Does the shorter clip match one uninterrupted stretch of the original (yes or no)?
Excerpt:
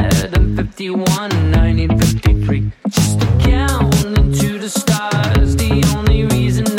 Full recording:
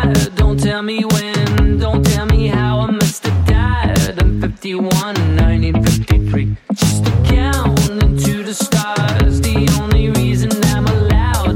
yes